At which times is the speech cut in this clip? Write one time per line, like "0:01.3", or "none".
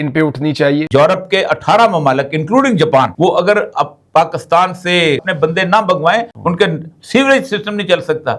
0:00.9
0:05.3
0:06.3